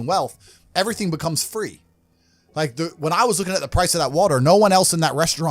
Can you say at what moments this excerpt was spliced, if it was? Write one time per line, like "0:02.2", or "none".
none